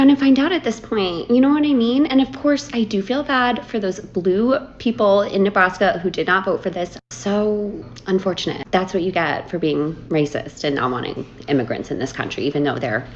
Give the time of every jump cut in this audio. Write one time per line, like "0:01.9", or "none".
none